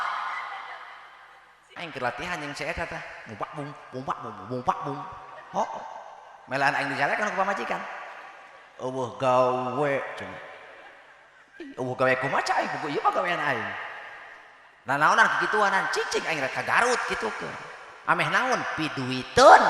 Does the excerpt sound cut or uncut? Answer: cut